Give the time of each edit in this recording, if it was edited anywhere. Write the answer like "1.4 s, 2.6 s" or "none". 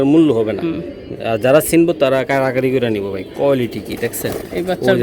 none

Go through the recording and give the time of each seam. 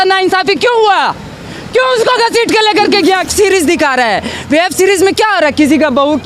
3.2 s

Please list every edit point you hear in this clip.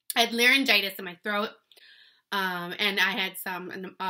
none

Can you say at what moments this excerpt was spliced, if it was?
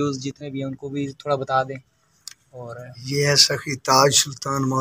none

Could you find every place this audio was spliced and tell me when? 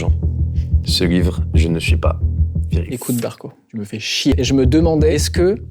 4.3 s

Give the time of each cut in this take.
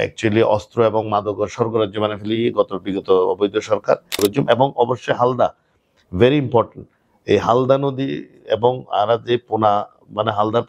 4.2 s

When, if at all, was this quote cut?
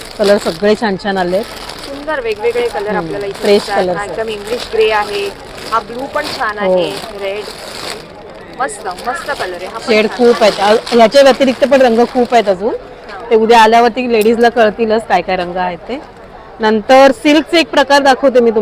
none

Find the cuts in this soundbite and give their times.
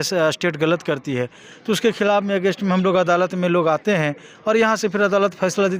none

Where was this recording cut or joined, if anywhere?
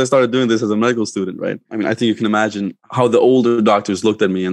1.7 s, 2.8 s

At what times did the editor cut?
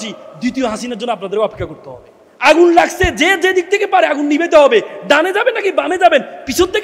2.3 s

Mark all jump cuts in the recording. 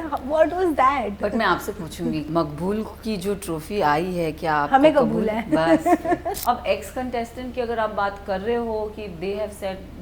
2.3 s, 6.4 s

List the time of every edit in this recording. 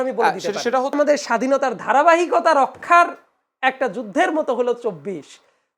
1.0 s

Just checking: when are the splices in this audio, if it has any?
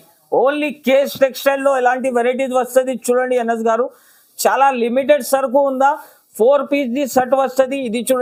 none

